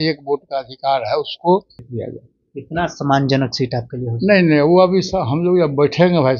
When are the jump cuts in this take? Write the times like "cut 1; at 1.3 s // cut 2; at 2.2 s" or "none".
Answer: cut 1; at 1.9 s